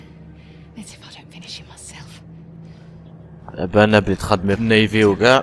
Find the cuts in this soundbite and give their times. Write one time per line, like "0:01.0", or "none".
0:03.5